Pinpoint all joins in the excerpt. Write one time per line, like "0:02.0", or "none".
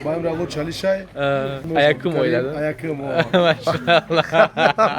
0:01.7